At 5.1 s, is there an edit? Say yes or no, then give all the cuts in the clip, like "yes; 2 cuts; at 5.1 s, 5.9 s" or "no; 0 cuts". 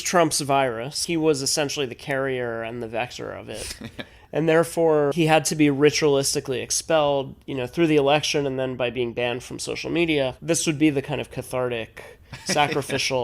yes; 3 cuts; at 1.0 s, 5.1 s, 10.4 s